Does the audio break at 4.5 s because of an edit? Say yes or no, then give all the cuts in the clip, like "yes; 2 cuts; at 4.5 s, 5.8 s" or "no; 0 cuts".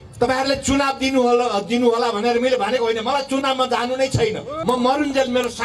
yes; 1 cut; at 4.5 s